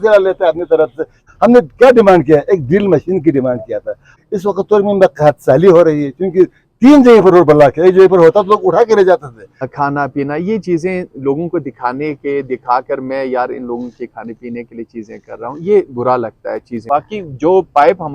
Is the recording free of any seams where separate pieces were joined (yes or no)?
no